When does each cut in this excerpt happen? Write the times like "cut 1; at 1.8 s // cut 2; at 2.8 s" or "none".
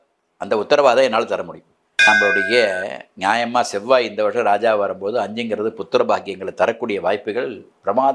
cut 1; at 1.9 s

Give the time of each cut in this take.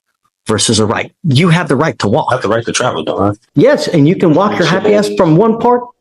cut 1; at 3.4 s

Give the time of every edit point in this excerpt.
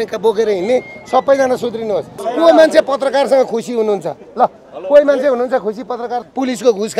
cut 1; at 2.2 s // cut 2; at 6.2 s

